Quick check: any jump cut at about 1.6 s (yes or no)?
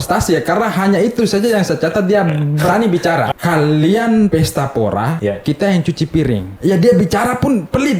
no